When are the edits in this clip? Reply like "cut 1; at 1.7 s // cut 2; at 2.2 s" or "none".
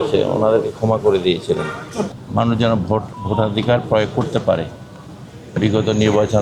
cut 1; at 2.2 s